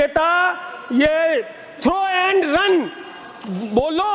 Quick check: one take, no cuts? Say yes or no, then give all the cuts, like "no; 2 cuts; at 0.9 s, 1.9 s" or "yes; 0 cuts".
yes; 0 cuts